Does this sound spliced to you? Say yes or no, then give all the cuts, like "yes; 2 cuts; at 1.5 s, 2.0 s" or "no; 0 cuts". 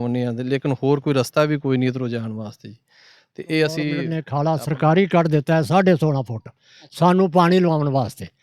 yes; 1 cut; at 4.2 s